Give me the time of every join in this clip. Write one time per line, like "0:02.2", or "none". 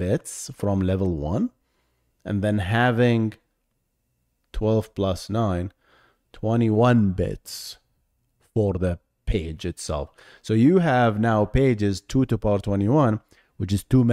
none